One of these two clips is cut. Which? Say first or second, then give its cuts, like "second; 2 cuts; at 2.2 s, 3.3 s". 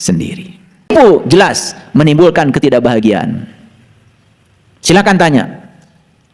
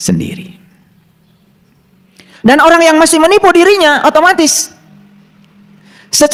first; 1 cut; at 0.9 s